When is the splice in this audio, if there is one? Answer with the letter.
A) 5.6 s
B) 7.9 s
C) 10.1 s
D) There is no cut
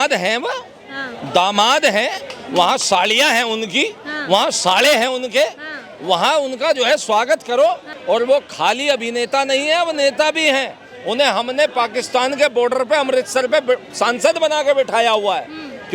B